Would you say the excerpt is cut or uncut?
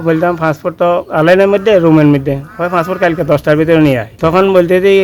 cut